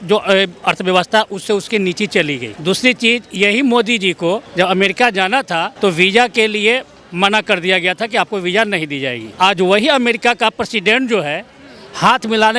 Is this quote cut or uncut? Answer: cut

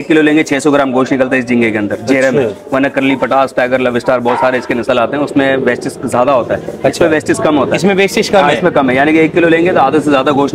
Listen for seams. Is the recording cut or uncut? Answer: uncut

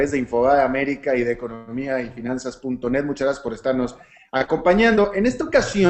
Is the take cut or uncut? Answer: uncut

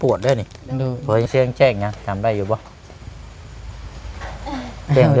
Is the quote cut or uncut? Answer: cut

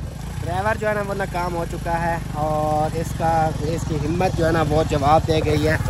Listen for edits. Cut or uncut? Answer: uncut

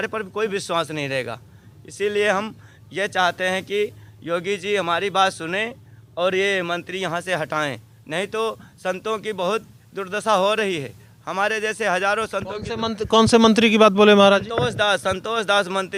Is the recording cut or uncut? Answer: uncut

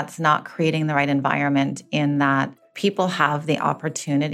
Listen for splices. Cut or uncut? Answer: cut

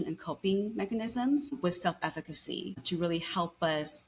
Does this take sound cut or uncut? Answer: cut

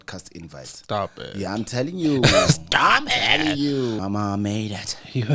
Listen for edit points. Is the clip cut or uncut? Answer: cut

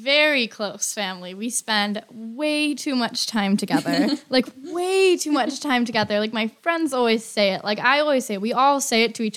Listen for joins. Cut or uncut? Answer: uncut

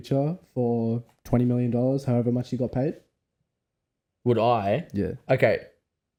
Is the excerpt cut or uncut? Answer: uncut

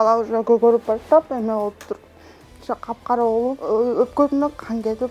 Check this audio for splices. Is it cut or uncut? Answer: cut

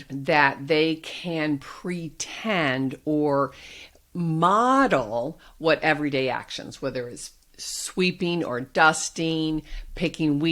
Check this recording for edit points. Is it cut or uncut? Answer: uncut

